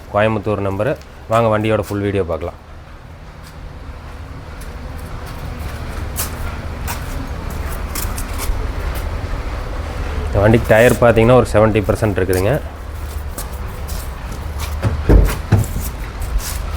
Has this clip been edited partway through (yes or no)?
no